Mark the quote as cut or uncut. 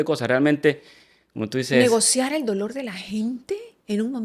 uncut